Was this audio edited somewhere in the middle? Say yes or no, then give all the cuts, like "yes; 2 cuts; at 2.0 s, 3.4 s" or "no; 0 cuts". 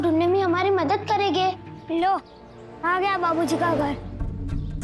yes; 1 cut; at 1.7 s